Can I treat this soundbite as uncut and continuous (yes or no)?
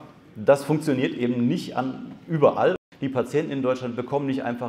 no